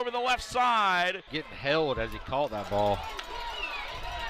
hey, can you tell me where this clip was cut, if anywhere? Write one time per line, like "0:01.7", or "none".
0:01.3